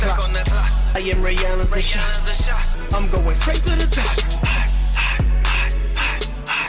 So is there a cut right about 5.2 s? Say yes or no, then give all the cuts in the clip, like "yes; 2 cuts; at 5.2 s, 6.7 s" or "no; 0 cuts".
no; 0 cuts